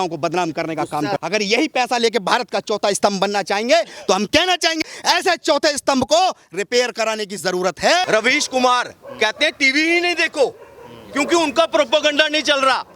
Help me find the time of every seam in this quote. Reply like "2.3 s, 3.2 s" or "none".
1.2 s, 4.9 s, 8.0 s

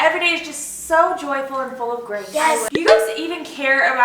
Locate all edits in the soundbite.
2.8 s

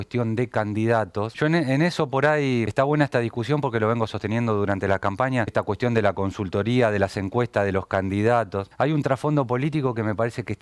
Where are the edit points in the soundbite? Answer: 1.3 s, 2.7 s, 5.5 s, 8.6 s

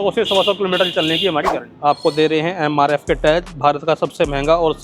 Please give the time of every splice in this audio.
1.7 s

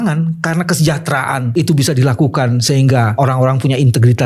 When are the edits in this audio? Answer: 1.4 s, 3.1 s

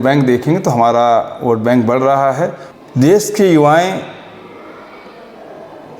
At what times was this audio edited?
2.7 s

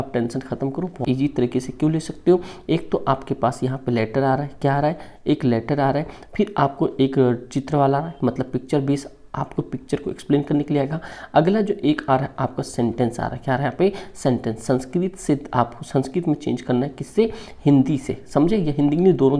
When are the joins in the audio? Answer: 1.0 s

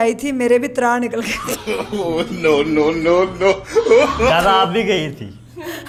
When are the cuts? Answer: none

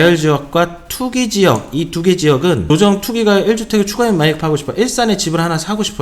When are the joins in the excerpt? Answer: 2.6 s

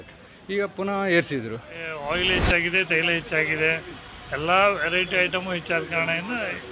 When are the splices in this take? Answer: 2.0 s

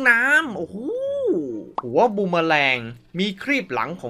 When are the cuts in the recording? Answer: 1.7 s

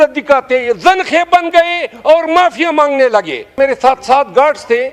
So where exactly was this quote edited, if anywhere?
3.5 s

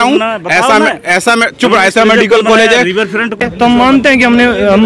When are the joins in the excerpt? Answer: 3.4 s

